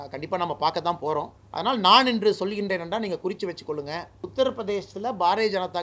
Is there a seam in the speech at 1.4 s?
yes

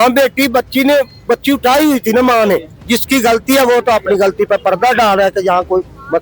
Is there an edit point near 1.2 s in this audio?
no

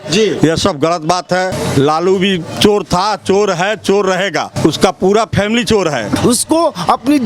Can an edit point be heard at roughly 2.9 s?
no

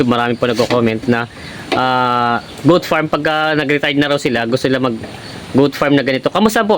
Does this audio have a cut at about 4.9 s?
no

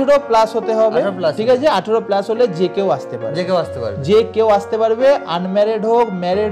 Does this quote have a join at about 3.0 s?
no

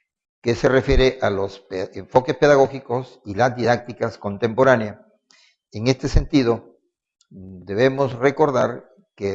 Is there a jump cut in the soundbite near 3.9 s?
yes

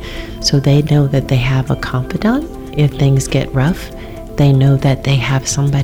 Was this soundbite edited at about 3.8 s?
no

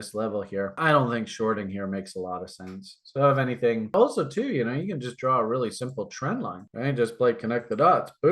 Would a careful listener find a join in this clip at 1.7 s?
no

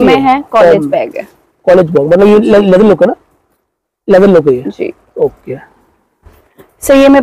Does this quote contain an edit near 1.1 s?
no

